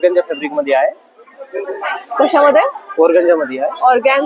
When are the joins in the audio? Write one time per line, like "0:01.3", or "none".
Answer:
none